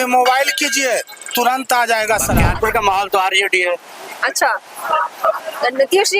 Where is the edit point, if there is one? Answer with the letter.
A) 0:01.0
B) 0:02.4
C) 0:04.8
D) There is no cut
B